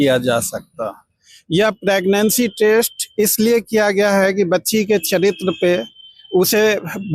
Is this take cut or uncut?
uncut